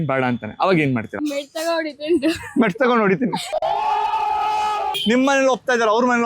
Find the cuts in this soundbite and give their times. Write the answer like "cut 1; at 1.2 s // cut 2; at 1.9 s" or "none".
cut 1; at 1.1 s // cut 2; at 4.9 s